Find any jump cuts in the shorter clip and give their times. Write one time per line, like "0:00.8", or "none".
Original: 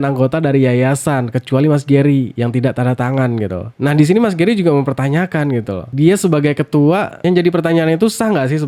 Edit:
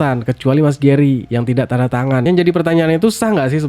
0:02.2